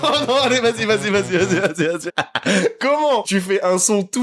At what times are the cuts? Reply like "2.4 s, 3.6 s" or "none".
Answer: 2.0 s, 3.3 s